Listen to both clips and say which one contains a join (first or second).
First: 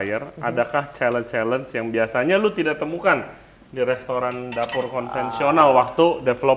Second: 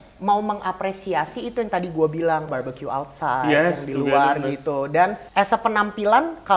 second